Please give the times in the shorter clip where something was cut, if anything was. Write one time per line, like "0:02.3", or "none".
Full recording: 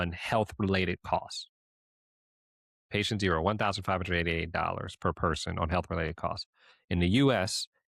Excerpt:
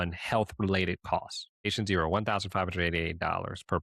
0:01.7

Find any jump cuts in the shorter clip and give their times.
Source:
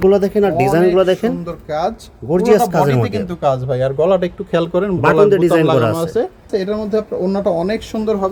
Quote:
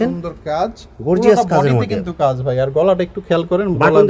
none

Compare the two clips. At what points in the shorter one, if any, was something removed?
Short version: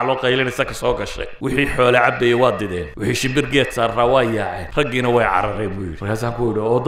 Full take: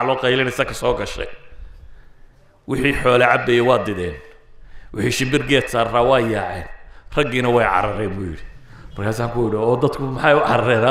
0:01.2
0:02.9
0:04.6
0:05.9

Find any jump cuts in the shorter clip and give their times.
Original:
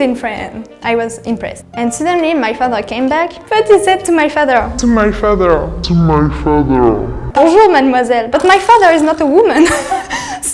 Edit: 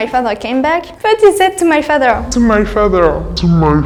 none

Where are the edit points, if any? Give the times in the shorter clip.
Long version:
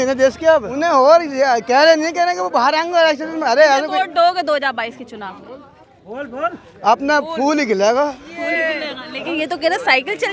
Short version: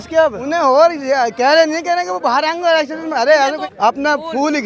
0:03.6

